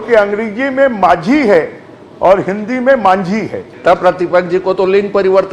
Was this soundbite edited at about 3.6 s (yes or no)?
yes